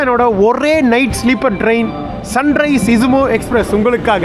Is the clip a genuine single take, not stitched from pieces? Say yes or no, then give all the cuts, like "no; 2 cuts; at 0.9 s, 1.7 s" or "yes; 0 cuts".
yes; 0 cuts